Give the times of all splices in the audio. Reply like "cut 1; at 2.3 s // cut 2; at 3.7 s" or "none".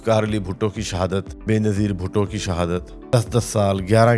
cut 1; at 1.3 s // cut 2; at 2.9 s